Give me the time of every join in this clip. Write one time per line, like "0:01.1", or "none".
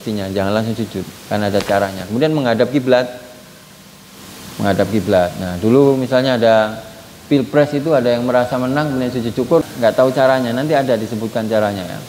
0:09.6